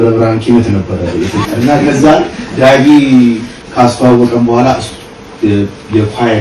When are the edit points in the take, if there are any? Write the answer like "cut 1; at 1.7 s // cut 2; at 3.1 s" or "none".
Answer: cut 1; at 1.4 s // cut 2; at 3.5 s